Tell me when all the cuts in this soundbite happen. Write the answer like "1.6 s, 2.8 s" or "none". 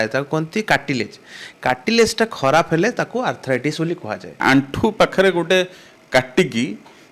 4.4 s

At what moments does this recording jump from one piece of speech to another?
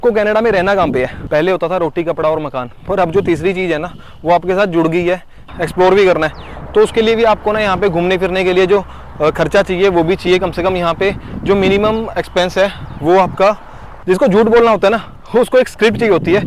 1.2 s, 5.5 s, 14.0 s

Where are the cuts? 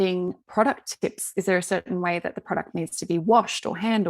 1.2 s

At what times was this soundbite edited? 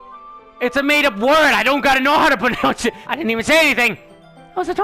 3.1 s

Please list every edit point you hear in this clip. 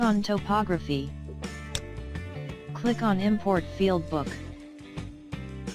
none

